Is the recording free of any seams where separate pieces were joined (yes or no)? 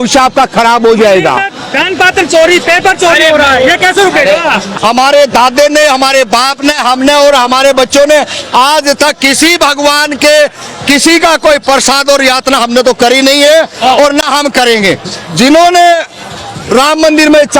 yes